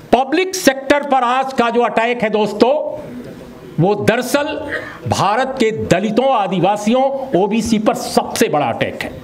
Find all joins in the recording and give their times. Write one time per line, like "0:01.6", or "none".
none